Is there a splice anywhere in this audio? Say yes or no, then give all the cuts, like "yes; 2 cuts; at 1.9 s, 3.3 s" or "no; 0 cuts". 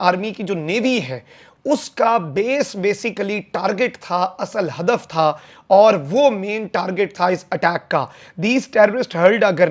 no; 0 cuts